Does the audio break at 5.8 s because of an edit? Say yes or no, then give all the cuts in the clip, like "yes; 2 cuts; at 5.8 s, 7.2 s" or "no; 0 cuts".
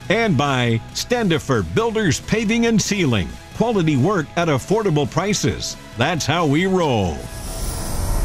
no; 1 cut; at 7.3 s